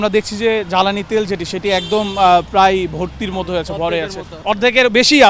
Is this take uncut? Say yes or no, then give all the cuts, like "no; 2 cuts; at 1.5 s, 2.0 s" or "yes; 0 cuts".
yes; 0 cuts